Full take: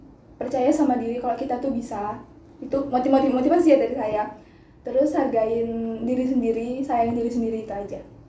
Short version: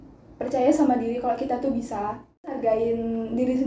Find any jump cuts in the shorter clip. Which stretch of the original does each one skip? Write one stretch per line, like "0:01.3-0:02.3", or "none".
0:02.6-0:05.3